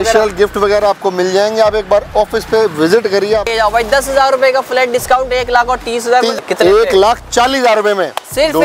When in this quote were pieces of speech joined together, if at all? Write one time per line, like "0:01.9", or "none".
0:03.5
0:06.4